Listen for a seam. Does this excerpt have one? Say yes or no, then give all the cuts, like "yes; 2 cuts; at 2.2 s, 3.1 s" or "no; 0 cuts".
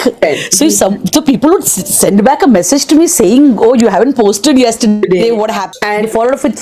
yes; 1 cut; at 5.6 s